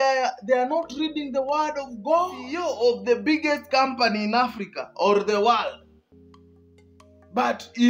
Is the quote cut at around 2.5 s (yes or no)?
yes